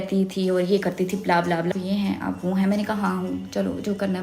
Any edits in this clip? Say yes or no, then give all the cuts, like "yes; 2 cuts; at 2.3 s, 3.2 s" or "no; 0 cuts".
yes; 1 cut; at 1.7 s